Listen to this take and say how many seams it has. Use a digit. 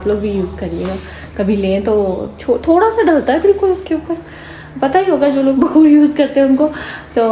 0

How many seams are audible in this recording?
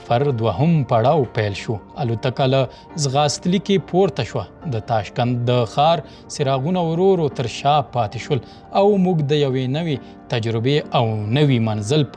0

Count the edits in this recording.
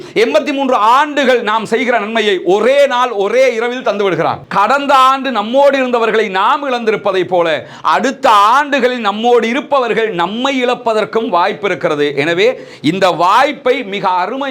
1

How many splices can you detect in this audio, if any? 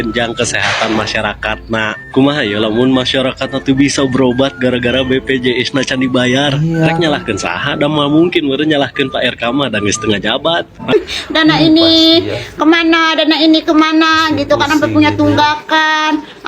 1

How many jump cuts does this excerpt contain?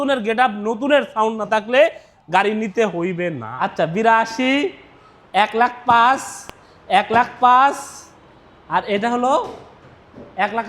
1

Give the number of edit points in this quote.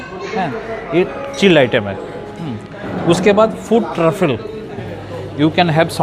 1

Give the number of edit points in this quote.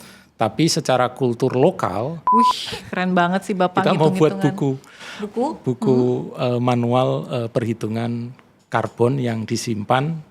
1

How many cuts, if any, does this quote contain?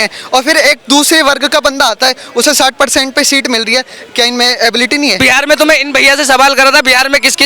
1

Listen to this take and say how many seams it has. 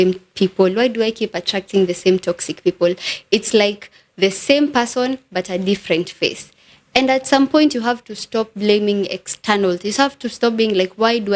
0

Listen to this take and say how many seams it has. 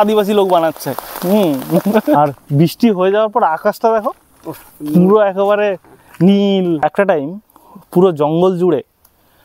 2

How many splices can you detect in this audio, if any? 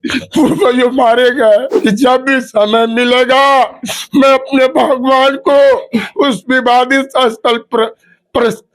1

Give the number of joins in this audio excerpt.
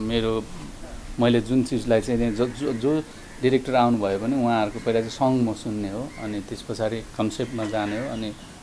0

